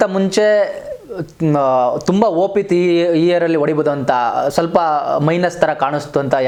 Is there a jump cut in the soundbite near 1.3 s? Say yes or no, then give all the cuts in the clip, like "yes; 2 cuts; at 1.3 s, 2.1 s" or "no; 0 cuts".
no; 0 cuts